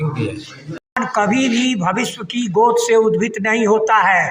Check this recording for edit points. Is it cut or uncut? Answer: cut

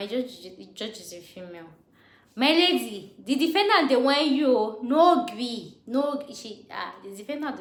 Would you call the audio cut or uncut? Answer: uncut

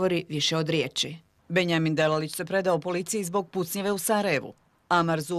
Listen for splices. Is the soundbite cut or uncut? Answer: uncut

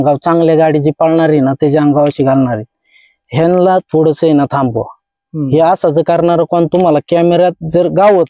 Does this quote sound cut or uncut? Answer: uncut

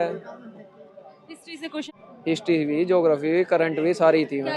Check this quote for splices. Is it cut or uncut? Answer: cut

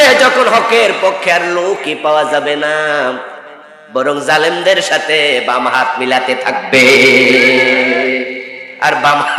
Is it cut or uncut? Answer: uncut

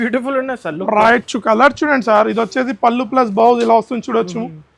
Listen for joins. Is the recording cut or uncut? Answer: uncut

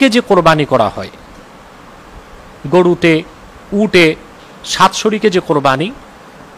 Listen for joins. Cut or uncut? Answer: uncut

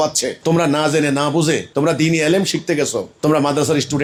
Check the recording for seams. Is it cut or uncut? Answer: uncut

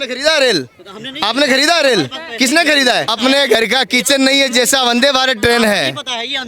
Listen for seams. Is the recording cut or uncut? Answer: cut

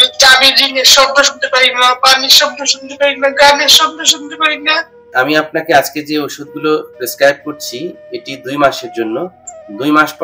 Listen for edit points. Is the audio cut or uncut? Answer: cut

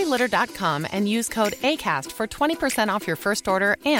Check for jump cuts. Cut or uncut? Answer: uncut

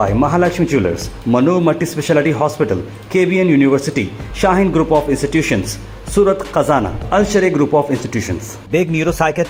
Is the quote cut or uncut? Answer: uncut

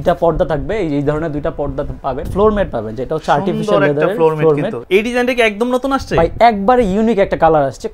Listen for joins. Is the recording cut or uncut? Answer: cut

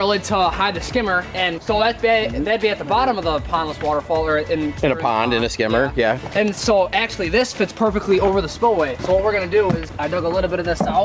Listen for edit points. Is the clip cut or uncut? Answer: uncut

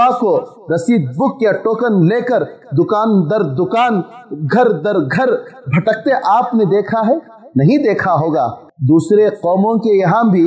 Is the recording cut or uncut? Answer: cut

